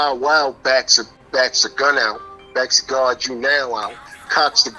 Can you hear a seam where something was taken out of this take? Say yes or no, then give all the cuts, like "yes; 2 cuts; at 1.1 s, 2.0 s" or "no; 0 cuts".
no; 0 cuts